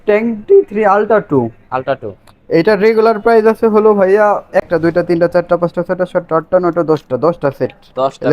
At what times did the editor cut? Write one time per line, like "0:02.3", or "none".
0:04.6

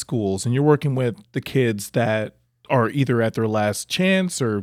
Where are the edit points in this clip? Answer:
none

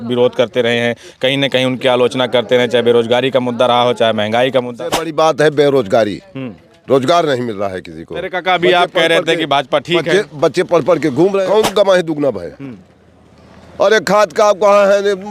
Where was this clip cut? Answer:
0:04.7
0:11.4

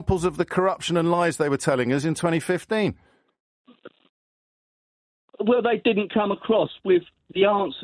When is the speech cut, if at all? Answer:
none

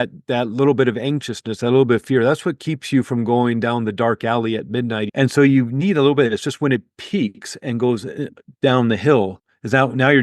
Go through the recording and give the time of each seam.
0:05.1

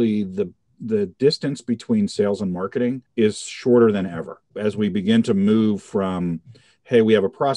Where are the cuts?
0:03.0
0:04.4

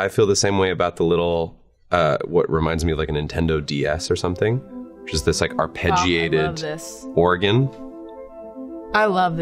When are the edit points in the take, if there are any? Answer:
none

